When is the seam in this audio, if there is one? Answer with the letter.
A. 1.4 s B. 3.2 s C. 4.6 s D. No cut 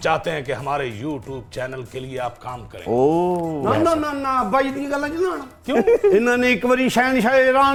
D